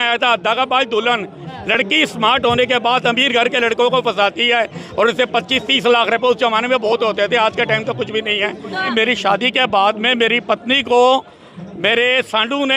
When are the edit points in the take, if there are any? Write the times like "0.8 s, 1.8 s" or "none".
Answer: 8.9 s